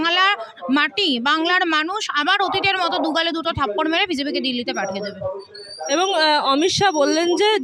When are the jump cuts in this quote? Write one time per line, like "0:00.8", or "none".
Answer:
none

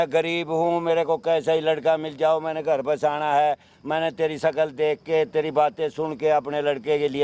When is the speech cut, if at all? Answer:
none

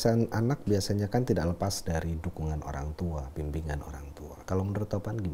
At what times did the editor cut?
0:04.4

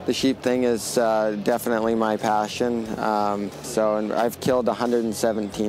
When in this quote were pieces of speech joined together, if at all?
0:03.7

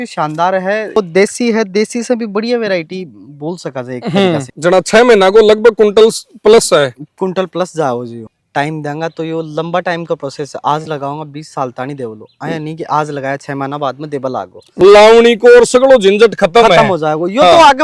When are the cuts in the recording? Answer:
0:01.0
0:04.5
0:08.2
0:14.6

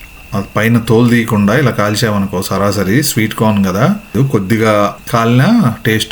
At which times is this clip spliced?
0:04.1
0:05.0

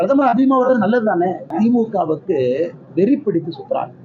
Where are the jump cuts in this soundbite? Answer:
0:01.5

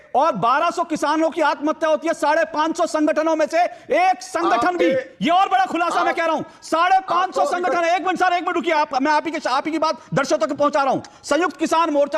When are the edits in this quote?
none

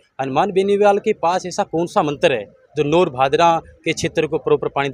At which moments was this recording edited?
none

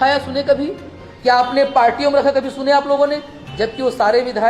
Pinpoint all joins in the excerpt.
none

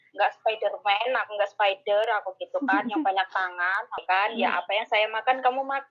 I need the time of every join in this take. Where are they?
0:03.9

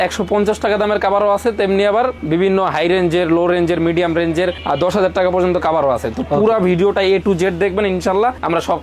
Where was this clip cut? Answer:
none

